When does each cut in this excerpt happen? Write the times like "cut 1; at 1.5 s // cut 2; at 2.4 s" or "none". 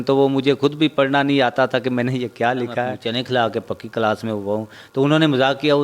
cut 1; at 3.0 s